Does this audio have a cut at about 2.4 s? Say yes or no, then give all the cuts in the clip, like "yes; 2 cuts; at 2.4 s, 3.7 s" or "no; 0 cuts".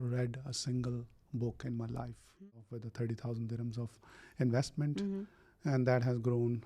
yes; 1 cut; at 2.4 s